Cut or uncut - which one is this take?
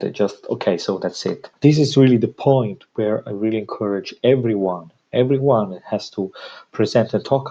cut